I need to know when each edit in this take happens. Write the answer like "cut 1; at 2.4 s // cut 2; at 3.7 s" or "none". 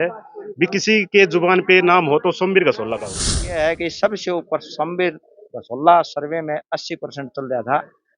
cut 1; at 3.5 s